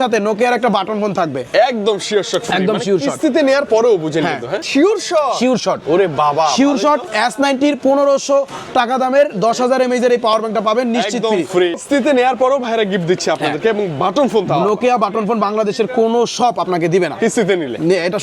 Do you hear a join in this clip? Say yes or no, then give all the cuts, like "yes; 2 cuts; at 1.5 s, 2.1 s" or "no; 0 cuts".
yes; 2 cuts; at 4.6 s, 11.8 s